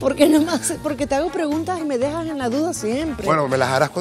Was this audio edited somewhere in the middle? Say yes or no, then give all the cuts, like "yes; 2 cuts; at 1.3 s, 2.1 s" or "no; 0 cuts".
no; 0 cuts